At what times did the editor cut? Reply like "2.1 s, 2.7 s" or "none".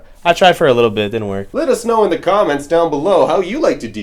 1.4 s